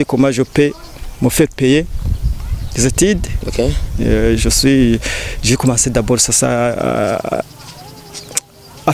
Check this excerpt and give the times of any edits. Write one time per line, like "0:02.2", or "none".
none